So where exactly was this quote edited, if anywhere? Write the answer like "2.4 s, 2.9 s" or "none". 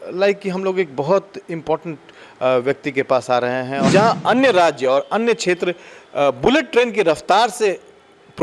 3.9 s